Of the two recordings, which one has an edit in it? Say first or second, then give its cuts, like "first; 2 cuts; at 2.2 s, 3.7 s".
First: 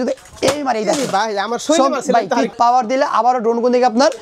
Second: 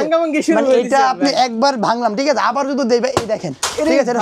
first; 1 cut; at 2.5 s